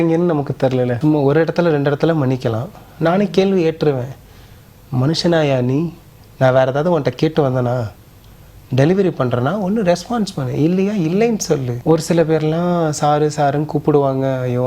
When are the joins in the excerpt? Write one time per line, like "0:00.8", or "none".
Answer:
0:01.0
0:11.7